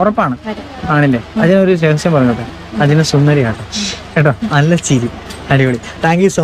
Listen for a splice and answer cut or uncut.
uncut